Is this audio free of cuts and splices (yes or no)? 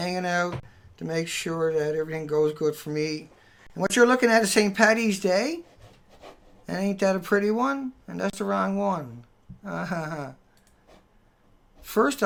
yes